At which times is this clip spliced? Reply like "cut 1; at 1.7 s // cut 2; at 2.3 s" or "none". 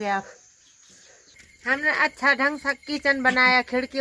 cut 1; at 1.3 s